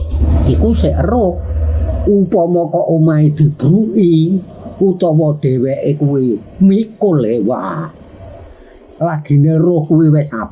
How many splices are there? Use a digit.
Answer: 0